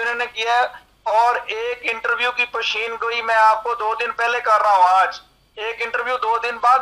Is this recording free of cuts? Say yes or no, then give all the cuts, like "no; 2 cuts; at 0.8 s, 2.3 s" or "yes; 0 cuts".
yes; 0 cuts